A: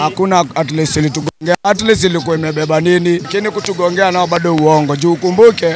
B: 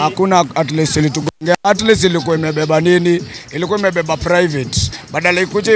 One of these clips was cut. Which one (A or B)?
A